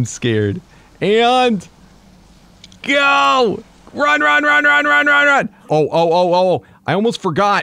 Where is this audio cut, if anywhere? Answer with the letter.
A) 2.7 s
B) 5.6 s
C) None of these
B